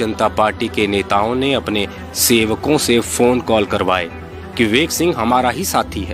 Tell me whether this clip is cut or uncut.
uncut